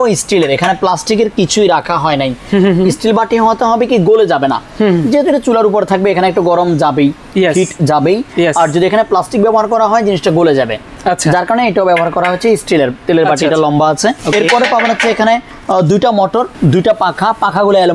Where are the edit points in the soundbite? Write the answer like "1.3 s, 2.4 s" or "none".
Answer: none